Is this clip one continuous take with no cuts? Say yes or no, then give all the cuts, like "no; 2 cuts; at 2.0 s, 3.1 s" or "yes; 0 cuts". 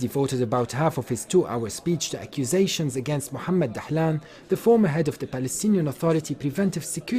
yes; 0 cuts